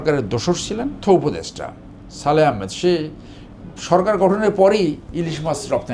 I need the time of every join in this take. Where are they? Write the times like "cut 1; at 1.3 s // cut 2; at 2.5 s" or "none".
cut 1; at 1.0 s